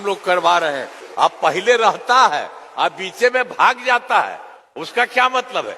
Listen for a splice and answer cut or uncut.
cut